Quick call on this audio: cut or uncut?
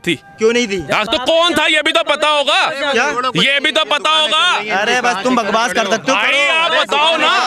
uncut